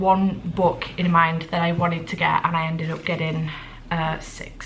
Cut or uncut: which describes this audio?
uncut